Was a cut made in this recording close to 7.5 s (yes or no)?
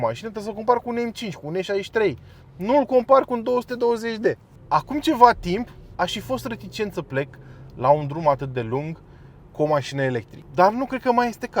no